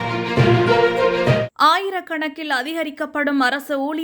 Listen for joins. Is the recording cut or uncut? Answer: cut